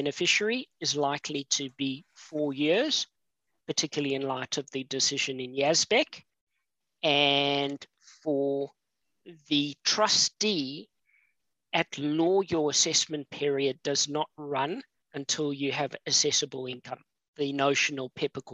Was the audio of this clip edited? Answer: no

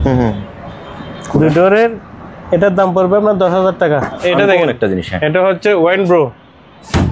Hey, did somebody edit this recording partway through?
yes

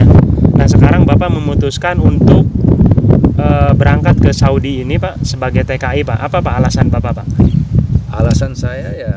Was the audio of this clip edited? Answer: no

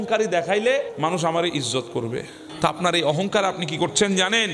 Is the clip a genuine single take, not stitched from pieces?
no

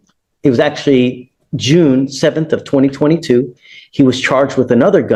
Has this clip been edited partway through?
no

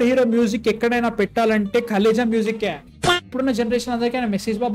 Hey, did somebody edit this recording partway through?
yes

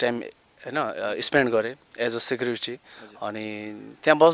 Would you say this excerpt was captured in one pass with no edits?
yes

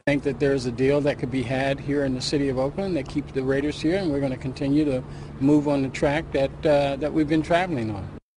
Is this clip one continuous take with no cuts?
yes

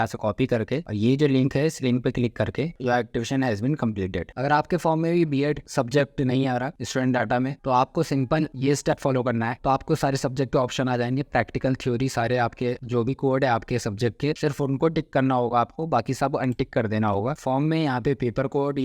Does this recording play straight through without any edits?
no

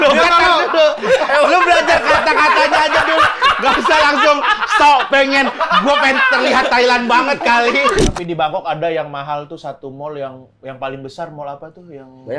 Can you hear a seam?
yes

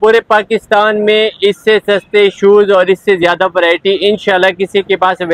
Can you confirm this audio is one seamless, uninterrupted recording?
yes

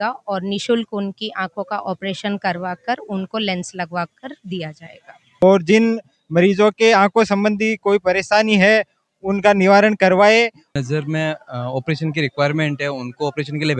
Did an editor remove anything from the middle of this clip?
yes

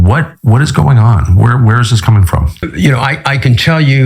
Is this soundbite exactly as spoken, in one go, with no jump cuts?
no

